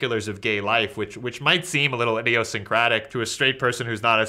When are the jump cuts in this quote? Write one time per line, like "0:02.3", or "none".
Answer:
0:03.1